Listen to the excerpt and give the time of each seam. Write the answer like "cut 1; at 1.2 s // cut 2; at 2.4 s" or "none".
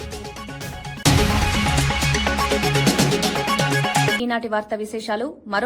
none